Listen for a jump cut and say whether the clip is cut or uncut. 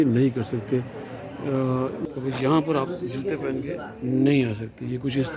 cut